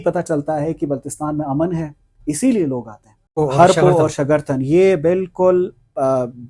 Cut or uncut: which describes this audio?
cut